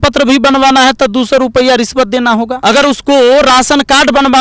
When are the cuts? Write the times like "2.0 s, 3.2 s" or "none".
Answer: 2.5 s

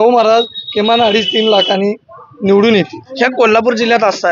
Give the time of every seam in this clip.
3.0 s

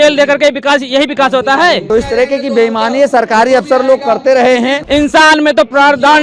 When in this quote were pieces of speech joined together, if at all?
1.8 s, 4.8 s

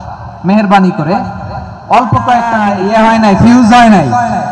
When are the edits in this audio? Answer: 2.7 s

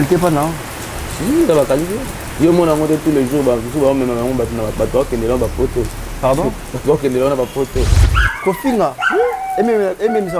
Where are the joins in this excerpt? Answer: 8.0 s

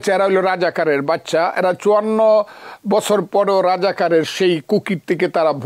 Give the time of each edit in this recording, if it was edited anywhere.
none

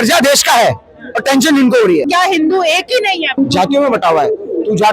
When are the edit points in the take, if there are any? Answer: 2.0 s, 3.3 s

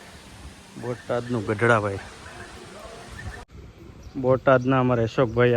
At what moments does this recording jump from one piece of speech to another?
3.4 s

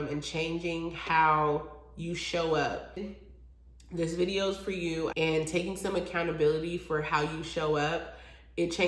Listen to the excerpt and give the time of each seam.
5.1 s

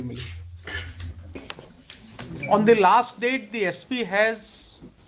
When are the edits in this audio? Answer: 1.4 s

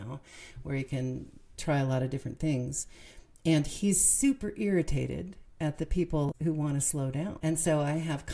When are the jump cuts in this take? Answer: 6.3 s, 7.4 s

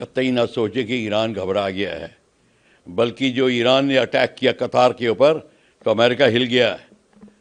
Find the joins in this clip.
none

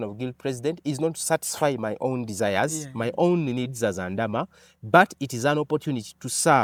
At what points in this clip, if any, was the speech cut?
none

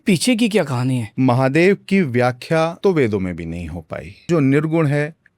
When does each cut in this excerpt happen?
1.1 s, 2.8 s, 4.3 s

